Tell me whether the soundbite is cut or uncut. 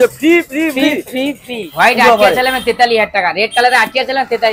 cut